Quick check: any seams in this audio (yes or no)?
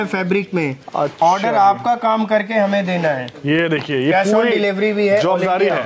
no